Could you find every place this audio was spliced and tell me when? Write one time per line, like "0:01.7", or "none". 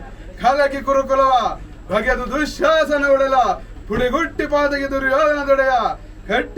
none